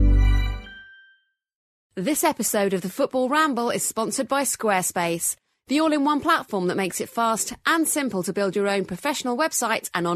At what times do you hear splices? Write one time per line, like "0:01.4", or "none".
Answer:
0:01.7